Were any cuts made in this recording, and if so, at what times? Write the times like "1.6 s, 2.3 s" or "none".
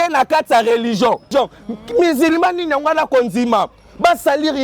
1.3 s